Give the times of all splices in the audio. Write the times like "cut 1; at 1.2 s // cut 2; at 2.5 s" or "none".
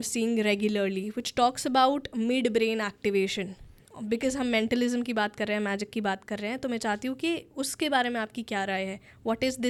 none